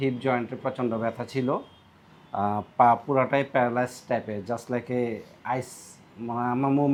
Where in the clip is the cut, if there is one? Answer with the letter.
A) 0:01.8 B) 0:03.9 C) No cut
C